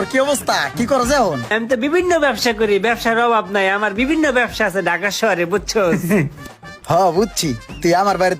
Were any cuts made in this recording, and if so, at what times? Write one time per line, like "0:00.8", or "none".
0:01.5

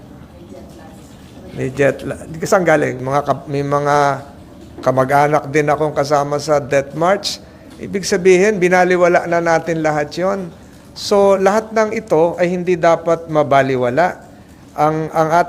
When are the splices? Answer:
0:03.0

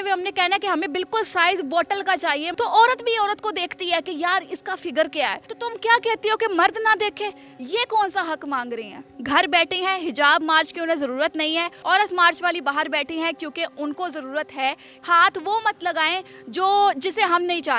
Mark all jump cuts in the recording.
0:02.5
0:05.5
0:09.1
0:11.7
0:14.9

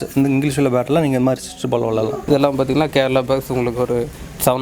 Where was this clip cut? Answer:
0:02.2

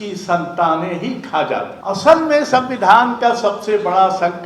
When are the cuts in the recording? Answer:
0:01.7

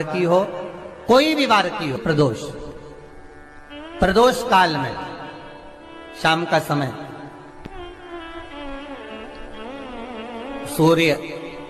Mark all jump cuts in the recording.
0:02.0

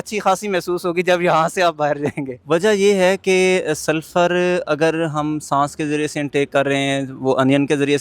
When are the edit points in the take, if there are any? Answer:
0:02.3

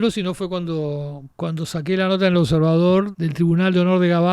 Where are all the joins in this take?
0:01.2
0:03.1

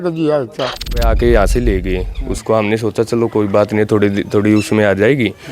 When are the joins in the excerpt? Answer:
0:01.1

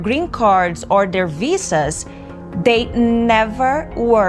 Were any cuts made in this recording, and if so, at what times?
none

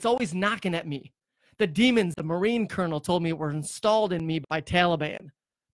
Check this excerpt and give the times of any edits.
0:02.1
0:04.4

